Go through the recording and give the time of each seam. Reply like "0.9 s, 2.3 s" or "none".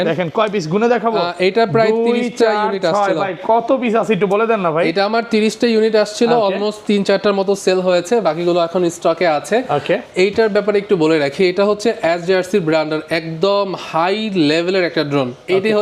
none